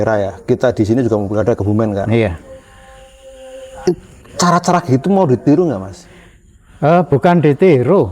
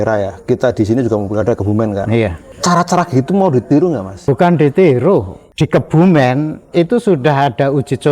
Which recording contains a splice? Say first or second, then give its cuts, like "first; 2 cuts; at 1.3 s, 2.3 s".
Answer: second; 3 cuts; at 2.5 s, 4.2 s, 5.4 s